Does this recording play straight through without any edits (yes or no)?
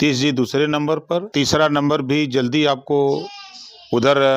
yes